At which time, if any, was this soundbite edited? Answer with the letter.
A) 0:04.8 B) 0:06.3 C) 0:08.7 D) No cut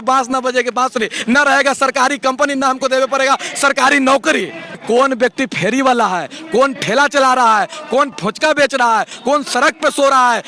A